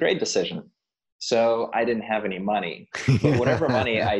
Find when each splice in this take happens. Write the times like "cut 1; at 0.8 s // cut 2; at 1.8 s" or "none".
cut 1; at 1.7 s